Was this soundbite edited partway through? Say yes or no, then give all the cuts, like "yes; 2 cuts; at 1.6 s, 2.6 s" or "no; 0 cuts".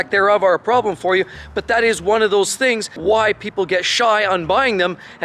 no; 0 cuts